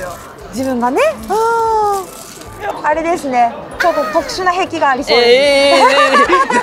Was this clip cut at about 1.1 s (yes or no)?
no